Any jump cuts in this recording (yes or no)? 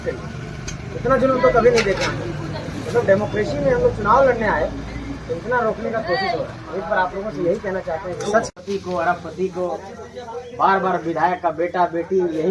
yes